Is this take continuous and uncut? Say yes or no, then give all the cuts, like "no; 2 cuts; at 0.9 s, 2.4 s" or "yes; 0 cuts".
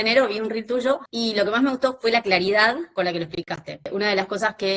no; 2 cuts; at 1.1 s, 3.9 s